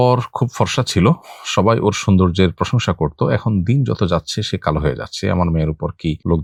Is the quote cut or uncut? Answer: uncut